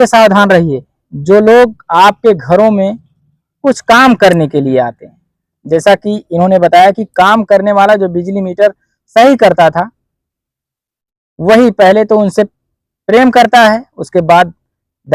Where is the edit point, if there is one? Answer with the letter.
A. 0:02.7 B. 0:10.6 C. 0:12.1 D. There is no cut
D